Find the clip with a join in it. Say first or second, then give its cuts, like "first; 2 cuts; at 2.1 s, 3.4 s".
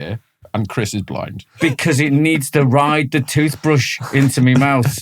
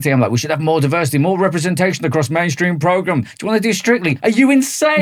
first; 1 cut; at 1.5 s